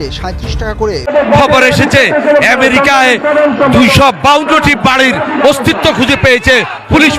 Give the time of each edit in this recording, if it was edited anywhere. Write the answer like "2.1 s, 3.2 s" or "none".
1.0 s